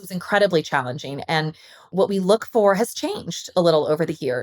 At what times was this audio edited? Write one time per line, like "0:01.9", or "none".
0:01.9